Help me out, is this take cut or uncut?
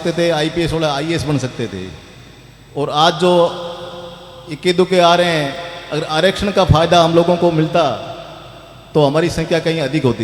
uncut